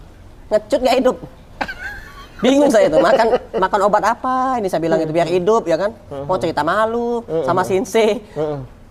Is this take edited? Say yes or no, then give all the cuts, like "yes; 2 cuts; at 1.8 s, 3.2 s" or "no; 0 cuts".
no; 0 cuts